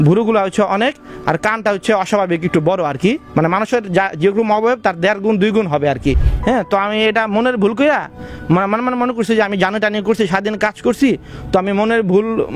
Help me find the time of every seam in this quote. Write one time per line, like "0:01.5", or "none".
0:06.3